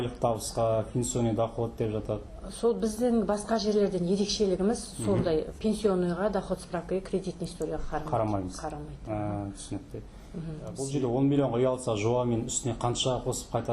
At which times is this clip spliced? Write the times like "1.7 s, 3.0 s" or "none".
10.8 s